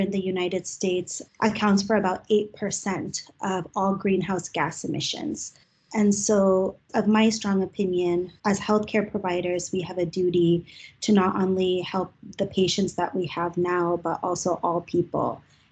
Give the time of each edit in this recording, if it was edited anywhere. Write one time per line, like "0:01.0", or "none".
none